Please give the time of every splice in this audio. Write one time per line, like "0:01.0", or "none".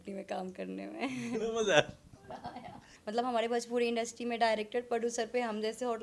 0:02.9